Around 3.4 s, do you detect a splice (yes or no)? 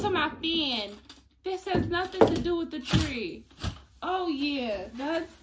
yes